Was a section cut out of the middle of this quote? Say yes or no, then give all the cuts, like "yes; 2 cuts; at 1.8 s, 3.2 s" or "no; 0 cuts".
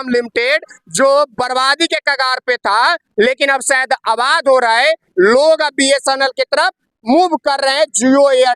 no; 0 cuts